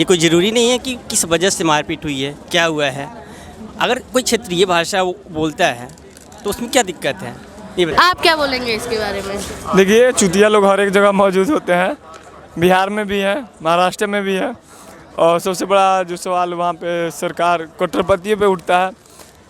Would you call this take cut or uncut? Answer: cut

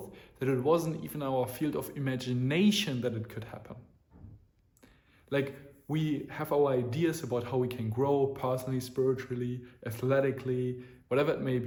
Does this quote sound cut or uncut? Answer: uncut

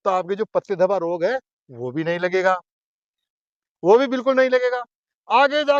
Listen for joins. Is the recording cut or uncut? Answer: uncut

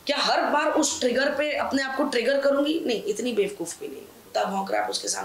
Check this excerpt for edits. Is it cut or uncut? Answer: cut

